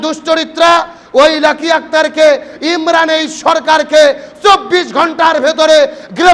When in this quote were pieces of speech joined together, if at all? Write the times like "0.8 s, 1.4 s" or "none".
none